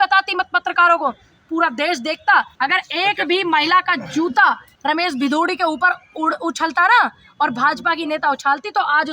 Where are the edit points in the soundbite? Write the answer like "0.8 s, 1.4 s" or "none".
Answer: 2.5 s, 4.7 s